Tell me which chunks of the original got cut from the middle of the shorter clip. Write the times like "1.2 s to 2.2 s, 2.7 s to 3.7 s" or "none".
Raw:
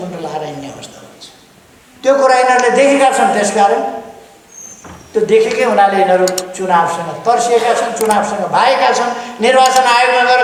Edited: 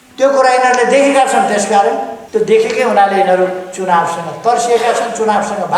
4.0 s to 5.0 s